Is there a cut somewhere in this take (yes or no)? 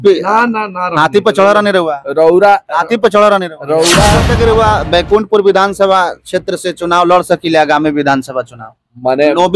yes